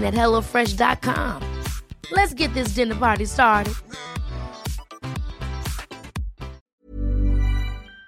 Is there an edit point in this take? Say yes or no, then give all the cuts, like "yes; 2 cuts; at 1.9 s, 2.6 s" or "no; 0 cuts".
yes; 1 cut; at 6.7 s